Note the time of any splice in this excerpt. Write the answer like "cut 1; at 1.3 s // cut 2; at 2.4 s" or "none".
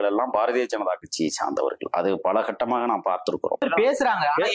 cut 1; at 3.6 s